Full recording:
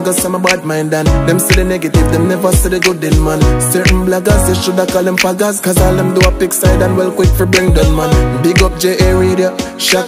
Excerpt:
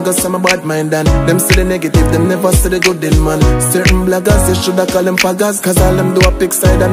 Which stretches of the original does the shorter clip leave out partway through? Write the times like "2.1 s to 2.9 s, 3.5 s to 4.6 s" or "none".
none